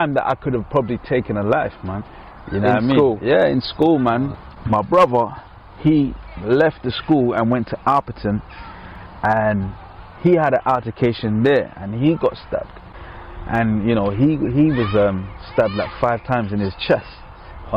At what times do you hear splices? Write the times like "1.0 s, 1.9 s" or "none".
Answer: 4.3 s